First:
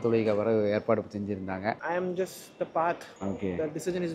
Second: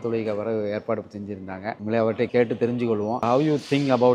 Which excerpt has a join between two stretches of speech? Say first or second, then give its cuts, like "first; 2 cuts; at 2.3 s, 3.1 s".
first; 2 cuts; at 1.8 s, 3.1 s